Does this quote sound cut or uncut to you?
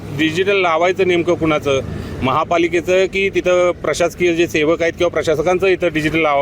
uncut